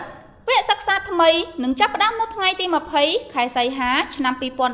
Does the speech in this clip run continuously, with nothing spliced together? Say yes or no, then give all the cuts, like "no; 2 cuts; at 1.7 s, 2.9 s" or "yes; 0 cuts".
yes; 0 cuts